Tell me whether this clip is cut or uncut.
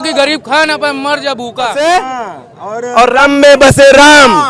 cut